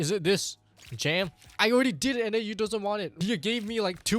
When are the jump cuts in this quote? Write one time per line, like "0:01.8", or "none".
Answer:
0:03.1